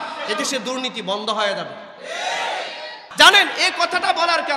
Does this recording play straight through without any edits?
no; 1 cut; at 3.0 s

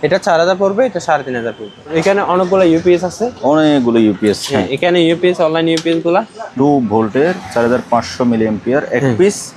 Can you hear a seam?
yes; 2 cuts; at 1.9 s, 6.4 s

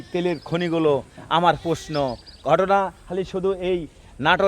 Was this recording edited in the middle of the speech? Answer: no; 0 cuts

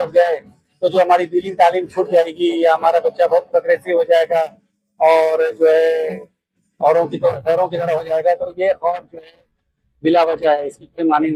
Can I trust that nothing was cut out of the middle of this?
yes; 0 cuts

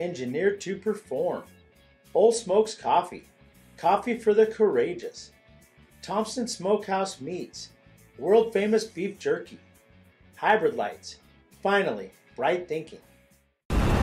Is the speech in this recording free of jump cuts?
yes; 0 cuts

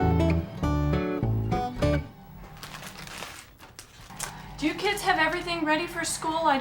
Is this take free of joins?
yes; 0 cuts

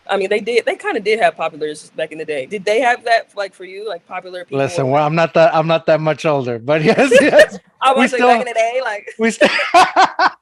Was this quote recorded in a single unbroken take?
yes; 0 cuts

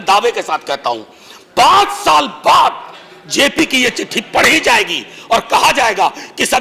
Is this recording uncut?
yes; 0 cuts

